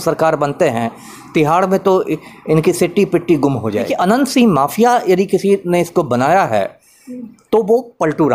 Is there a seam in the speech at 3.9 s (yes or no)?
yes